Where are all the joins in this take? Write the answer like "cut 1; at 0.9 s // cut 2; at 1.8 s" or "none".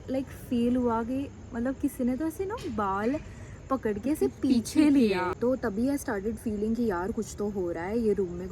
cut 1; at 5.4 s